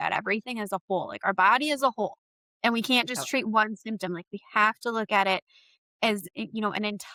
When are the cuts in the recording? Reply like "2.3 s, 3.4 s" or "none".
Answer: none

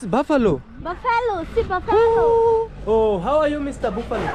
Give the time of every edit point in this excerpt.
2.6 s

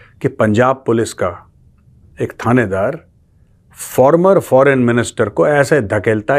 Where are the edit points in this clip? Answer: none

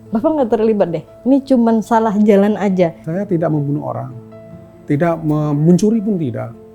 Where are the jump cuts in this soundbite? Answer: 3.1 s

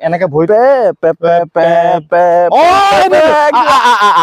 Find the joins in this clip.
none

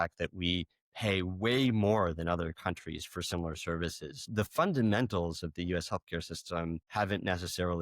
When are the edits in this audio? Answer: 4.3 s, 6.8 s

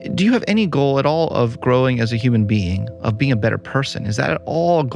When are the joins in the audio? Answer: none

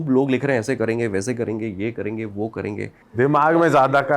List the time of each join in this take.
3.0 s

